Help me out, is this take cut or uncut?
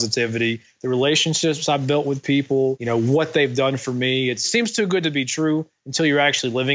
cut